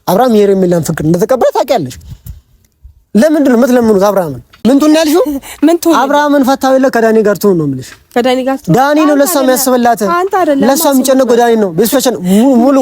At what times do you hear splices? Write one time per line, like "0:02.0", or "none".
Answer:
0:04.6